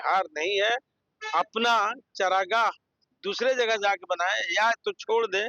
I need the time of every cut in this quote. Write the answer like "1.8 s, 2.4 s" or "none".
none